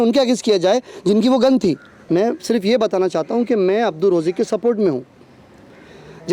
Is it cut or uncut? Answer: cut